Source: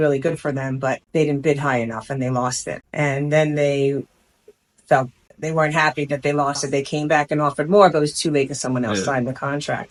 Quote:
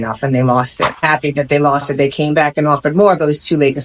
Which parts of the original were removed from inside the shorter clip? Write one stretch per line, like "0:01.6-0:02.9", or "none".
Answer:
0:02.9-0:05.8

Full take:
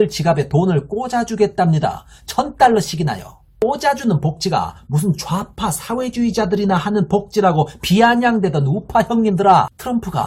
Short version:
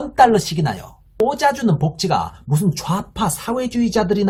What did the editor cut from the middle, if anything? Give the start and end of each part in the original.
none

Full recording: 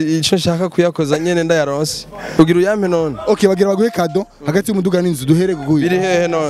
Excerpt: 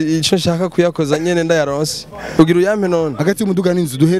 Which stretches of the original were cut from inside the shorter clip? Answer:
0:03.1-0:04.4

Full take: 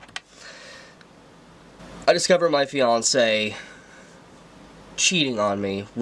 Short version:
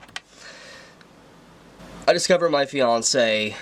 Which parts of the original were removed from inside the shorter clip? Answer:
none

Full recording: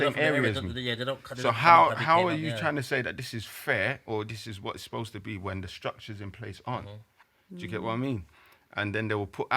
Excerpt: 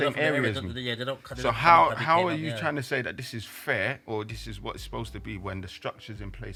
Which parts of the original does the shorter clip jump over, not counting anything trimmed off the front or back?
none

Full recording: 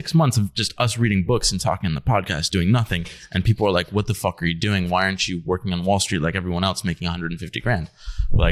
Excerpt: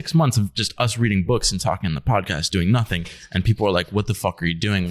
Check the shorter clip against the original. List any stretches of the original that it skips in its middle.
none

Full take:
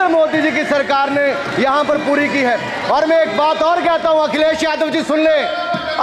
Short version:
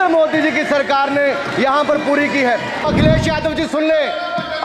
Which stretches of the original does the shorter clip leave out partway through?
0:02.9-0:04.2

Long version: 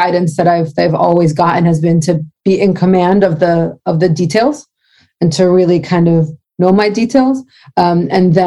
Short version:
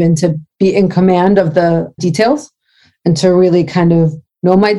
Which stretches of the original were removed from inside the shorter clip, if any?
0:03.8-0:04.1

